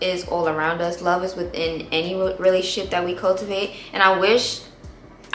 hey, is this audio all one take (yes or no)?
yes